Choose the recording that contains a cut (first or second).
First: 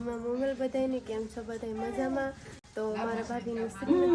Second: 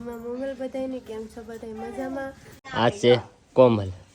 second